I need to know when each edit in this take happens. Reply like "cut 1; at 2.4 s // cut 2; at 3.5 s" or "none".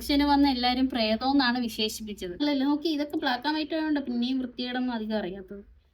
cut 1; at 2.4 s